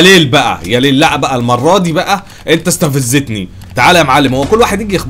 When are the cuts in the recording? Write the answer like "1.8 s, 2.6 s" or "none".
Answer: none